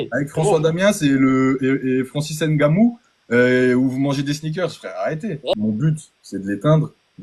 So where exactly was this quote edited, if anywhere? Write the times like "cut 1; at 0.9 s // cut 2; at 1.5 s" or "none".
cut 1; at 5.5 s